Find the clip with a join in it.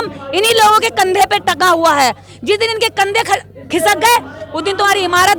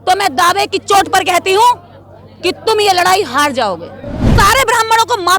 second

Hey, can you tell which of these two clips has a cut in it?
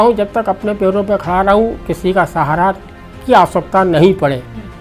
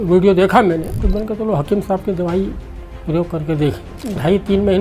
second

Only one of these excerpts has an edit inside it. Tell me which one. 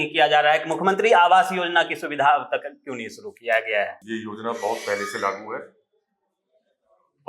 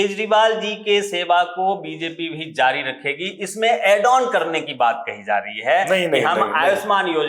first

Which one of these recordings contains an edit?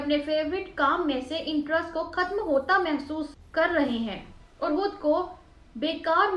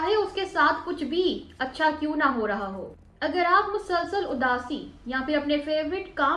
second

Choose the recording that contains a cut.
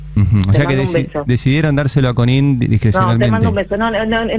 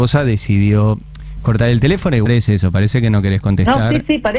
second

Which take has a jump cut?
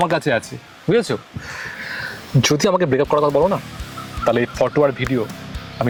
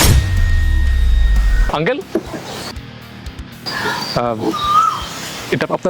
second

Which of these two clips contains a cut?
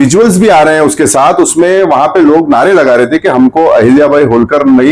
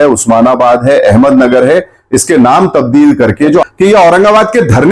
second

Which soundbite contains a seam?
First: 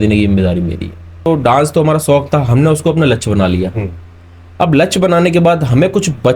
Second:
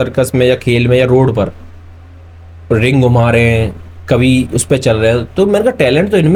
first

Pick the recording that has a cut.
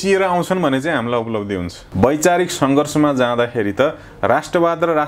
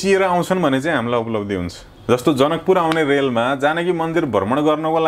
first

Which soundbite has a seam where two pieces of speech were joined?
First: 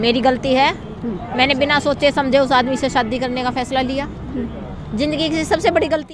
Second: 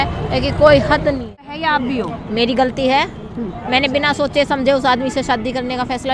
second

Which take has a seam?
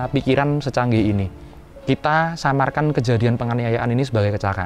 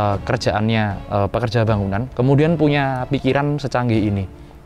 second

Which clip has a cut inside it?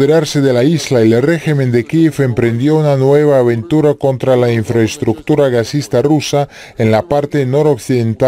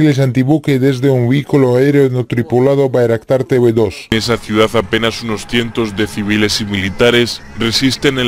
second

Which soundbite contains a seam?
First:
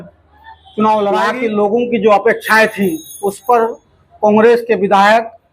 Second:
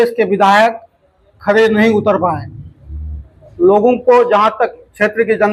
first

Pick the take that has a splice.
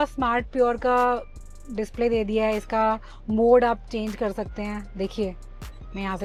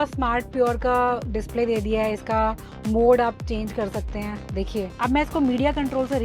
second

